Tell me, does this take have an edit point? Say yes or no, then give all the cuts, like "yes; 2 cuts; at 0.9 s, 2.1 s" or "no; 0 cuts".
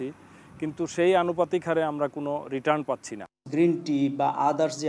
yes; 1 cut; at 3.2 s